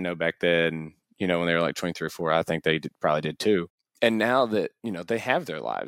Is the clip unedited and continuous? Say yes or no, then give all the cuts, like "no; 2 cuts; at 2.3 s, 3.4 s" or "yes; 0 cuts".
no; 2 cuts; at 3.8 s, 4.8 s